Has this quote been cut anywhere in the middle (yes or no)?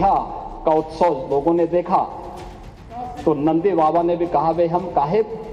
no